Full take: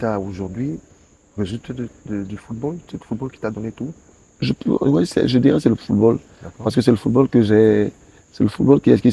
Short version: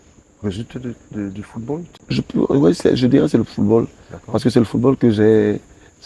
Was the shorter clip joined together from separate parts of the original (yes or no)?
yes